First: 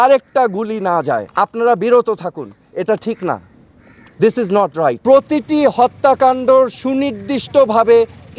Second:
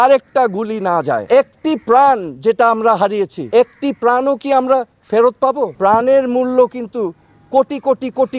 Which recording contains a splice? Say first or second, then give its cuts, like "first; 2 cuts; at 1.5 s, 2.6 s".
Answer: second; 2 cuts; at 1.2 s, 5.7 s